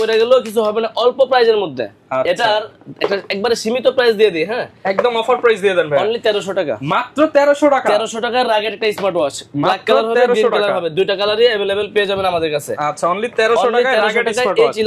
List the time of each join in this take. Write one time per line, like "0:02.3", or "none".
none